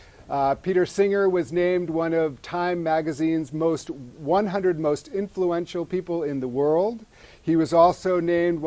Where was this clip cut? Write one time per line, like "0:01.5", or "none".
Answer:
0:03.1